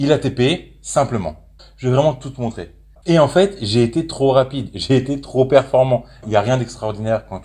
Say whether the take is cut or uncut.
cut